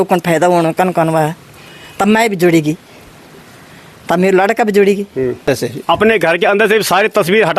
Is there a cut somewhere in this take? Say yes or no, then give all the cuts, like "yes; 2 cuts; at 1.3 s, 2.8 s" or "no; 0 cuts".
yes; 1 cut; at 5.5 s